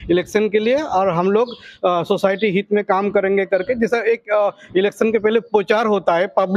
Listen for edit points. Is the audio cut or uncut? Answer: uncut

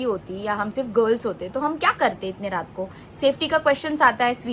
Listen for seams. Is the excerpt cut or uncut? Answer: uncut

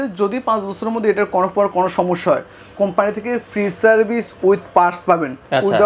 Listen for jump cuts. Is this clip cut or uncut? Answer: uncut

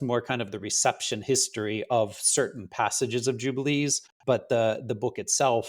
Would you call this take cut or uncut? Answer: cut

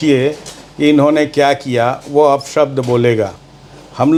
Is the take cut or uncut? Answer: uncut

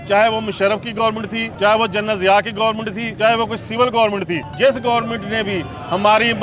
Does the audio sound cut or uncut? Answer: cut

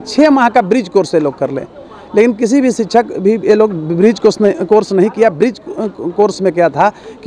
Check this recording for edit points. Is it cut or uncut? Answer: uncut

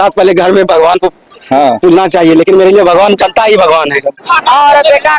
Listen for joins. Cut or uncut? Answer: cut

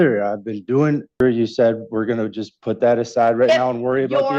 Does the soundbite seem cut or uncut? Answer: cut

